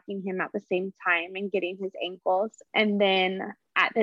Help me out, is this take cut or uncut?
cut